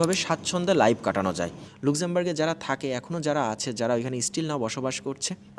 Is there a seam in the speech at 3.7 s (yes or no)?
no